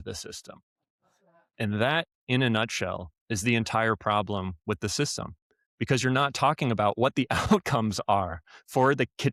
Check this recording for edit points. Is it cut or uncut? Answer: uncut